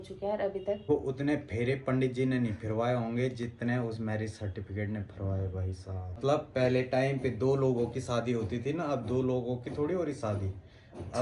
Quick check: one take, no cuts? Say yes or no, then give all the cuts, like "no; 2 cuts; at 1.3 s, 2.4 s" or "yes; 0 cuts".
no; 2 cuts; at 0.9 s, 6.2 s